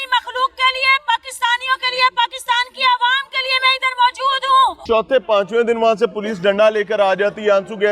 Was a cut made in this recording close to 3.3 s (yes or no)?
no